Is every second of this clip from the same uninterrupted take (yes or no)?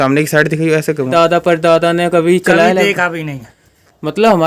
no